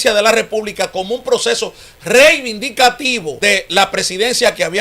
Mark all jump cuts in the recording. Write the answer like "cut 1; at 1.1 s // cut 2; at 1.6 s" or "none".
cut 1; at 3.6 s